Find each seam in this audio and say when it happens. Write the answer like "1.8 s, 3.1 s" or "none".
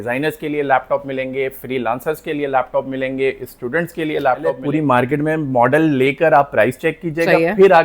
4.6 s

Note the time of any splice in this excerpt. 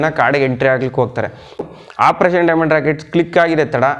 1.5 s

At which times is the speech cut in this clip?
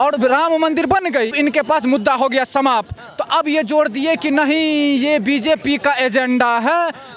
1.3 s

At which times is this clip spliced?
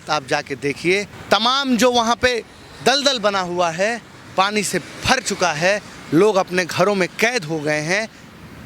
1.1 s

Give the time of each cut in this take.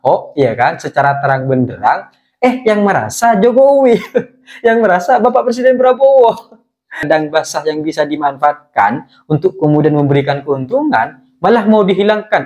7.0 s

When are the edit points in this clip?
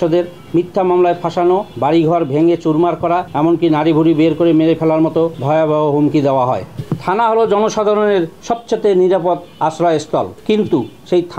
1.7 s, 3.3 s, 5.4 s, 6.7 s

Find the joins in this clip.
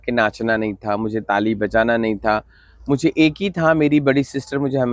none

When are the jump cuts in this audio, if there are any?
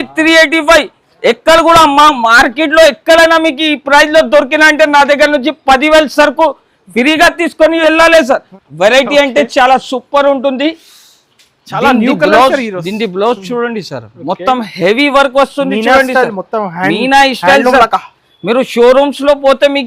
8.6 s

